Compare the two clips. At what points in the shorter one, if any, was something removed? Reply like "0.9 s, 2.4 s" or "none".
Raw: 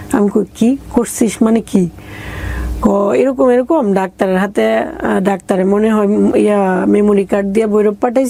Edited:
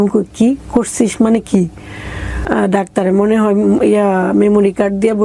2.4 s